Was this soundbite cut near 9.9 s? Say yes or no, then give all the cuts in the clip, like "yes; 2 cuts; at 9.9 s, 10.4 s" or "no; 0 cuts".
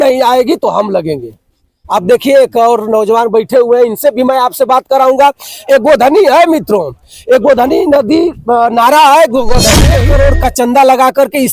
yes; 1 cut; at 9.9 s